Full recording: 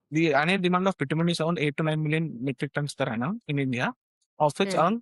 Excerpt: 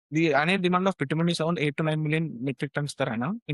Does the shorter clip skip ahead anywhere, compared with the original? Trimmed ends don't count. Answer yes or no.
no